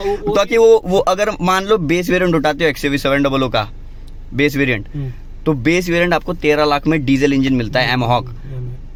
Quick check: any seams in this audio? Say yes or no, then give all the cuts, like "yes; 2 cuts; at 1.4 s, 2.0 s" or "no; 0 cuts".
no; 0 cuts